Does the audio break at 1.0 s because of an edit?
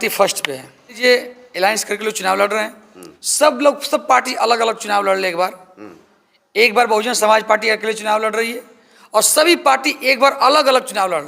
yes; 1 cut; at 1.0 s

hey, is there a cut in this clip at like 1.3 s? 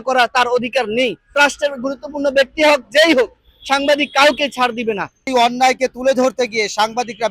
yes; 2 cuts; at 1.3 s, 5.3 s

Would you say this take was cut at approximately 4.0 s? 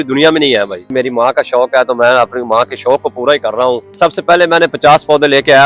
yes; 2 cuts; at 0.9 s, 4.0 s

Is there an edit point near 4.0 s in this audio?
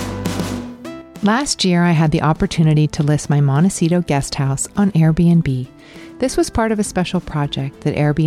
no; 1 cut; at 1.1 s

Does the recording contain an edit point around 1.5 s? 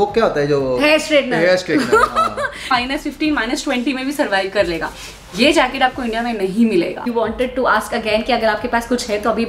no; 2 cuts; at 2.7 s, 7.1 s

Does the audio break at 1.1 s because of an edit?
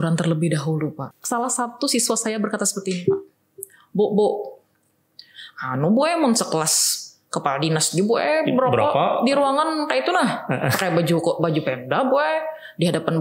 yes; 1 cut; at 1.1 s

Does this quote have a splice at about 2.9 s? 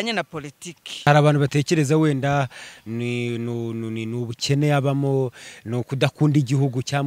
no; 1 cut; at 1.1 s

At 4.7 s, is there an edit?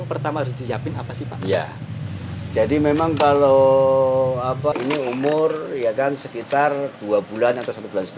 yes; 1 cut; at 4.7 s

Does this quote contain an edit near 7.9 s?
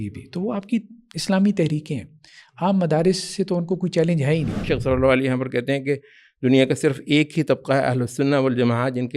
no; 1 cut; at 4.7 s

